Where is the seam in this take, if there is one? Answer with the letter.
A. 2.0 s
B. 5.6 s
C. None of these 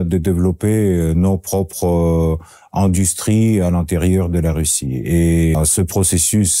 B